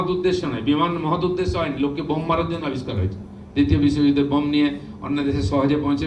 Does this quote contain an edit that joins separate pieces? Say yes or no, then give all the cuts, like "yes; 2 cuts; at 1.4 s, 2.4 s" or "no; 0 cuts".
no; 0 cuts